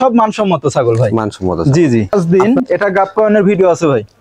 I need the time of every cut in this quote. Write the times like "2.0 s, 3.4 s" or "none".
2.1 s